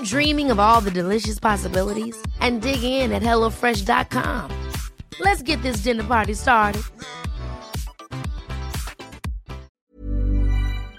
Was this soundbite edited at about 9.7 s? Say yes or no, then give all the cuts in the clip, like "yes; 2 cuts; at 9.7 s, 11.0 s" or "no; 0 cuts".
yes; 1 cut; at 9.7 s